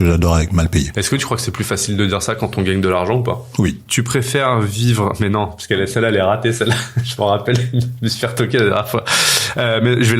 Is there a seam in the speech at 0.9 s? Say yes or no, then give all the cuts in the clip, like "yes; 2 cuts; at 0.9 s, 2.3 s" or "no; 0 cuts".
yes; 2 cuts; at 0.9 s, 3.8 s